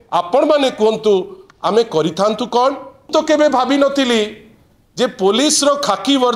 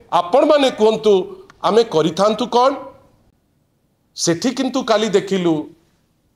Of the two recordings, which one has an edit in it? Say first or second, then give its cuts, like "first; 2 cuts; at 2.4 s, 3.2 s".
first; 1 cut; at 3.1 s